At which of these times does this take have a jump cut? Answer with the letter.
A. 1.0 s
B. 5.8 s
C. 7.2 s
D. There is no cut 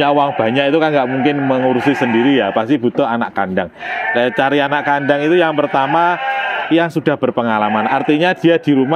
D